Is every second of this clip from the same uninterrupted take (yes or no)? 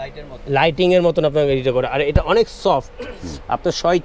yes